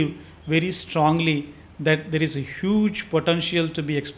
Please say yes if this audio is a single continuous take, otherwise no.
yes